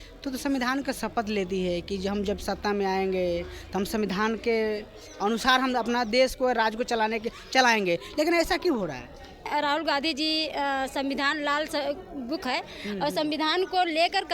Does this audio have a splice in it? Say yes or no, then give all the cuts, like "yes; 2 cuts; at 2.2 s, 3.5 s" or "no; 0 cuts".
yes; 1 cut; at 9.5 s